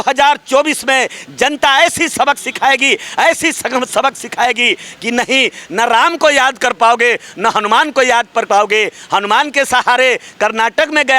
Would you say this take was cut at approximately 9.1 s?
no; 0 cuts

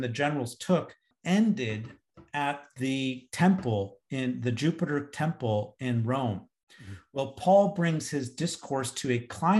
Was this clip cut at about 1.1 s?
yes; 1 cut; at 1.1 s

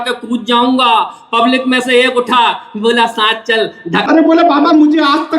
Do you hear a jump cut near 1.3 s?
no; 1 cut; at 4.1 s

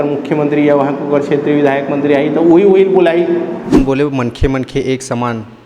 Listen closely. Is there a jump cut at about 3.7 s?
yes; 1 cut; at 3.7 s

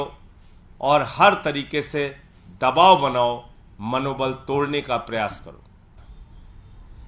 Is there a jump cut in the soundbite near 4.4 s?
no; 1 cut; at 6.0 s

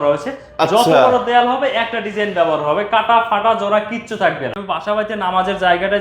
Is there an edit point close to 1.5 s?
no; 1 cut; at 4.5 s

